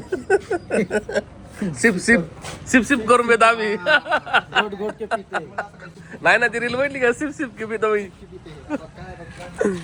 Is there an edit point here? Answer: no; 0 cuts

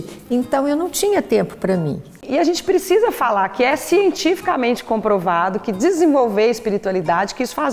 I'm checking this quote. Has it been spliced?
yes; 1 cut; at 2.2 s

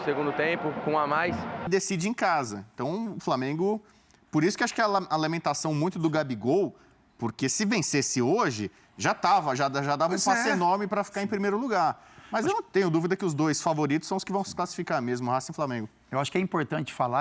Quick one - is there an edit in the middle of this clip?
yes; 1 cut; at 1.7 s

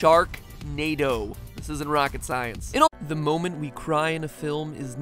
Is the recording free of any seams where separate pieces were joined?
yes; 0 cuts

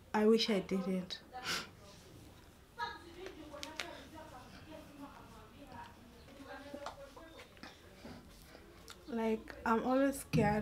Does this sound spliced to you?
yes; 1 cut; at 6.3 s

